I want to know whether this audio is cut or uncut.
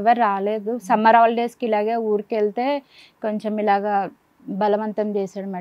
uncut